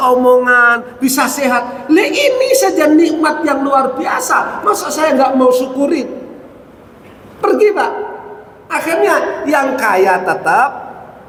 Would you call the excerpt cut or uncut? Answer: uncut